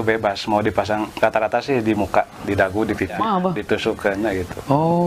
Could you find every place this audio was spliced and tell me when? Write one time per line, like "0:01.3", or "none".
0:03.2